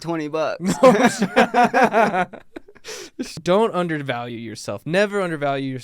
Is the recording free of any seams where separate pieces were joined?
no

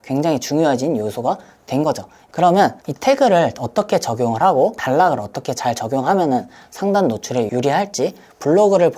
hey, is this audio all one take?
no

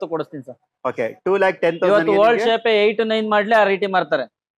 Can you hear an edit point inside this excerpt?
no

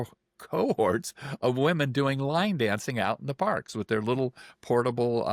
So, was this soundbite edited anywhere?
no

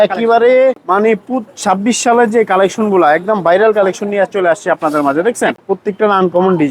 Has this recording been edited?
yes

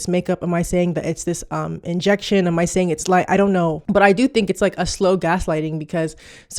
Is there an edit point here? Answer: yes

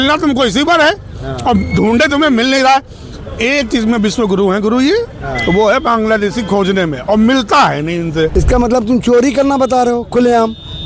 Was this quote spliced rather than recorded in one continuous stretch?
yes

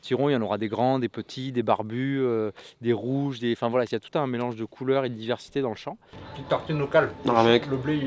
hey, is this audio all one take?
no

